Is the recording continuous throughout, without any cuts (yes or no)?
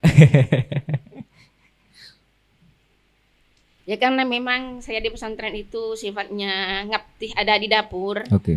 yes